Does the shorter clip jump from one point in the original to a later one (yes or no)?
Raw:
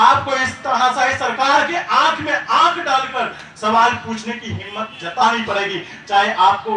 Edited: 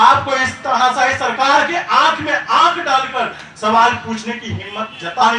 no